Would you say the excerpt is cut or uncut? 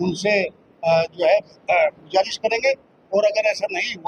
uncut